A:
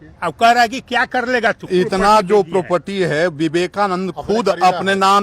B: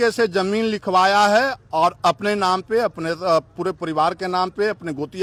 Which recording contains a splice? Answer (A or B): A